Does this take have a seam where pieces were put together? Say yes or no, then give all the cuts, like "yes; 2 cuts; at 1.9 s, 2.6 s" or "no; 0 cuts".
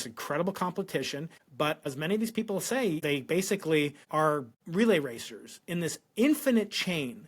yes; 3 cuts; at 1.7 s, 3.0 s, 4.2 s